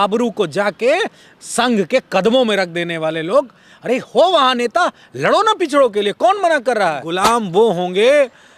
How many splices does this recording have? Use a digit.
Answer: 1